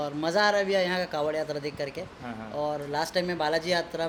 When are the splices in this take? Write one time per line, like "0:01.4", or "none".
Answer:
none